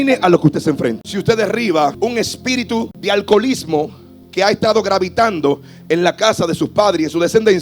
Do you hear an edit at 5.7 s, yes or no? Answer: no